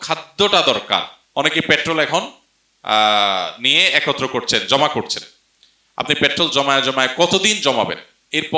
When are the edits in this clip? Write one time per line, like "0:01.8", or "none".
0:01.2